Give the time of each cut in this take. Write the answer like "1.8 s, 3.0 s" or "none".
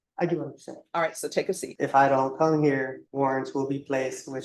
1.7 s, 3.0 s